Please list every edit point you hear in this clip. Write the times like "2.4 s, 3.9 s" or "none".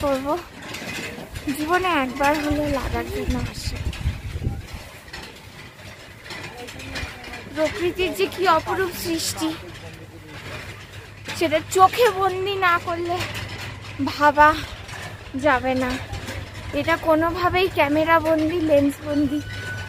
none